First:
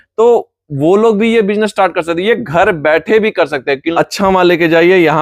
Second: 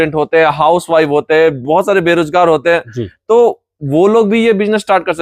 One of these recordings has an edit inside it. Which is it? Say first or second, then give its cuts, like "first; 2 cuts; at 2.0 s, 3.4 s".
first; 1 cut; at 3.9 s